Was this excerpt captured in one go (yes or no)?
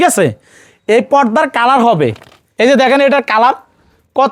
no